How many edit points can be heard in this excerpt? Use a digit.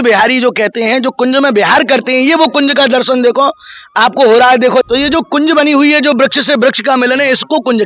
1